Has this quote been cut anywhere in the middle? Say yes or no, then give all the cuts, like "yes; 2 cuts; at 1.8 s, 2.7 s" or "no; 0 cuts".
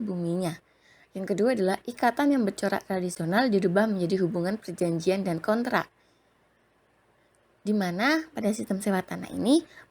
yes; 1 cut; at 8.6 s